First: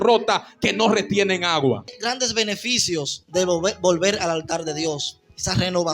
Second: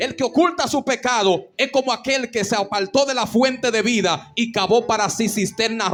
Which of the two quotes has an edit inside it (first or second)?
first